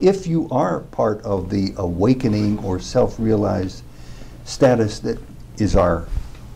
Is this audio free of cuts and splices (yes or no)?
no